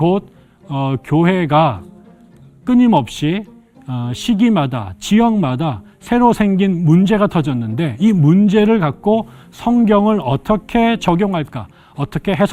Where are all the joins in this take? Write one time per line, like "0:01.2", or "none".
none